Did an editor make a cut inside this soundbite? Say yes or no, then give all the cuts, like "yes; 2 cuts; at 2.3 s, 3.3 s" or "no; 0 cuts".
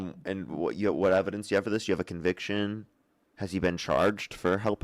no; 0 cuts